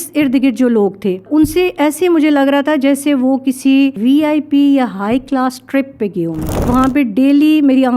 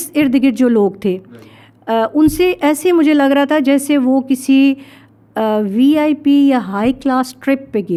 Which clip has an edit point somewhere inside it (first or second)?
first